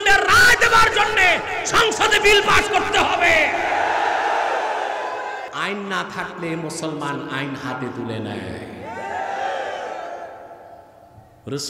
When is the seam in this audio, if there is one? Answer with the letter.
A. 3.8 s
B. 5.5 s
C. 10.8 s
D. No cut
B